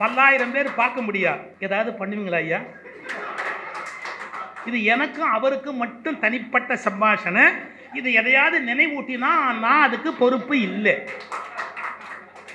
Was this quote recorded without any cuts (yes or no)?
no